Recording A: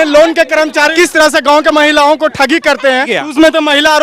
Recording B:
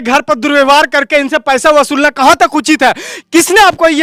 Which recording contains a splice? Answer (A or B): A